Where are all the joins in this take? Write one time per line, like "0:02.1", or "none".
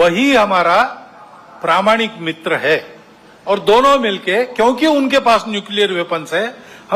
none